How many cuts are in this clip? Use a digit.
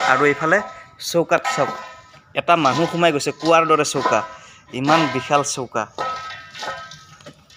0